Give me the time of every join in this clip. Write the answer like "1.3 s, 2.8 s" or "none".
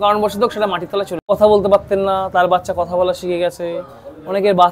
1.2 s